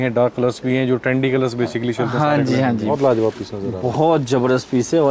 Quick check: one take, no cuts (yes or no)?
no